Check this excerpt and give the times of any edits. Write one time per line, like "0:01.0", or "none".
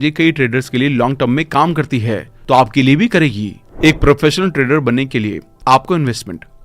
0:03.6